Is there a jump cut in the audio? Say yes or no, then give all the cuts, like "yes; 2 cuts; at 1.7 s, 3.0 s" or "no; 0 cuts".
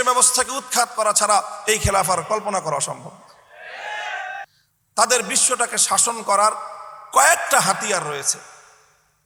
yes; 1 cut; at 4.5 s